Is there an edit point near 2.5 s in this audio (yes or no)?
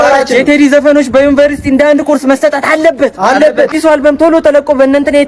no